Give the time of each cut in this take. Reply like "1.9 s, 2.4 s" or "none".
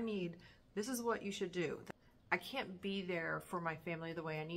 2.0 s